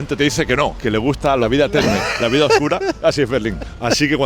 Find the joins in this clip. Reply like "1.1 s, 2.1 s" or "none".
1.0 s